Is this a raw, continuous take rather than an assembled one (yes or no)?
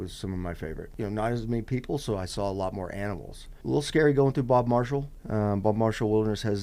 no